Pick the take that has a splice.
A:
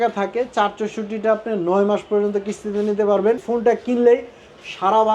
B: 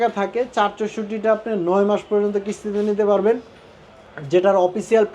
A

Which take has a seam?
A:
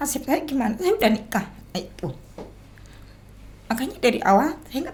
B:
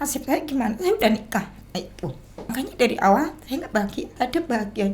B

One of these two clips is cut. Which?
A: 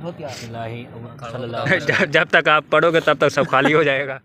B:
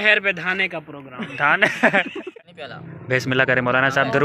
B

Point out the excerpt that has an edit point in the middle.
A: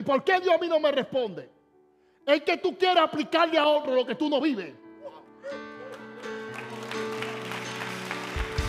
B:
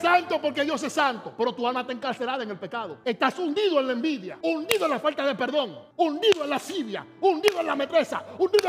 B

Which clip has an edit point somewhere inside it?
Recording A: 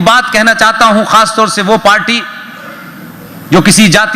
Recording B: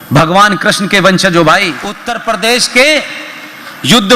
B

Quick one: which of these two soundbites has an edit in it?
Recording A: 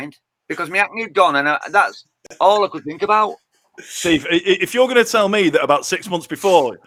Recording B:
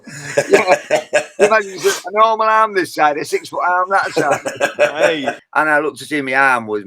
B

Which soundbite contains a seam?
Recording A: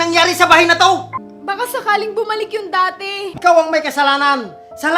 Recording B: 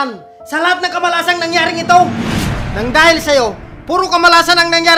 A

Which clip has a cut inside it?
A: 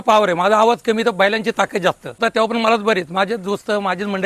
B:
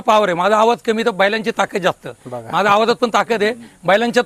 A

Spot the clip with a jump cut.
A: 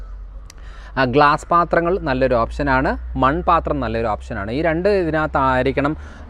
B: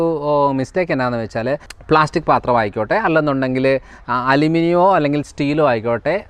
B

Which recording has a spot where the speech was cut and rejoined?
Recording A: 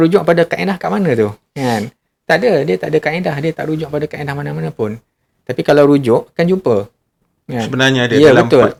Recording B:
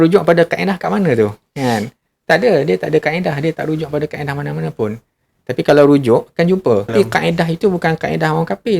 B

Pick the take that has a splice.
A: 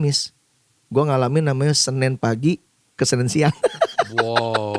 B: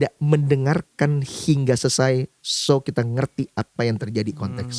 A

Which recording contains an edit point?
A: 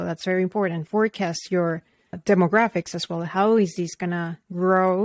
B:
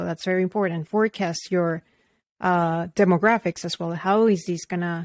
A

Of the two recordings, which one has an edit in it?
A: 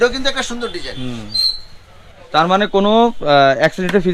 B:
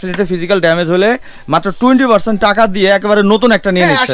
A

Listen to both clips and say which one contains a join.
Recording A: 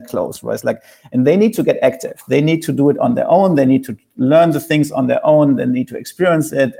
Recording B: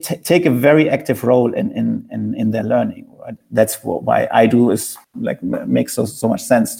B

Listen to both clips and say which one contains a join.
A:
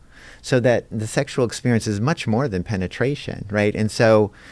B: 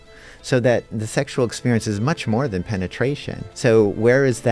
B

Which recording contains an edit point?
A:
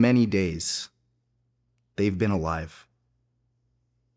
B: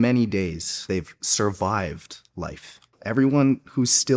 B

